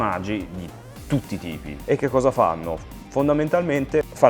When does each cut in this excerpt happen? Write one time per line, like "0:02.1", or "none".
0:01.8